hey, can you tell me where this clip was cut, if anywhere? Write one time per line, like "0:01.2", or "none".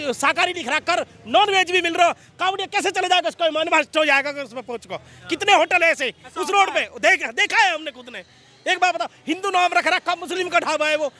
none